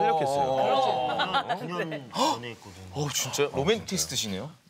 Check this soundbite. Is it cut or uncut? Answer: cut